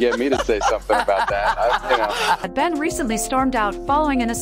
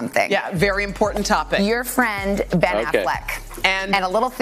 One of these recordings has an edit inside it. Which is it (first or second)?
first